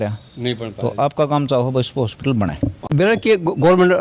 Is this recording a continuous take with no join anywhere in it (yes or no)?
no